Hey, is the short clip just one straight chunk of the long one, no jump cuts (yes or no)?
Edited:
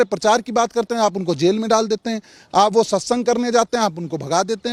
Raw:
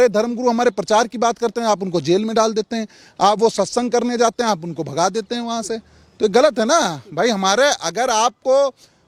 yes